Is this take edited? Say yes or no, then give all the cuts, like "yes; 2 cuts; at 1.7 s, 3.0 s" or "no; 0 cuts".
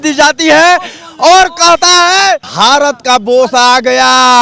yes; 1 cut; at 2.5 s